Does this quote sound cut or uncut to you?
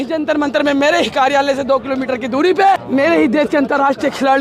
cut